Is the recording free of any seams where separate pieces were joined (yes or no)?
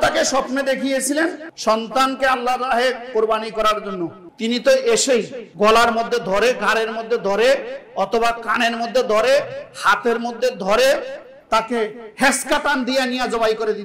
no